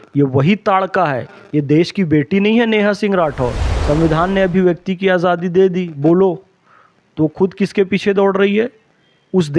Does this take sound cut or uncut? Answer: cut